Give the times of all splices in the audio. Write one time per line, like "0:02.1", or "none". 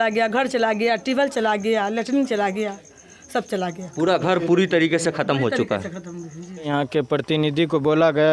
0:06.6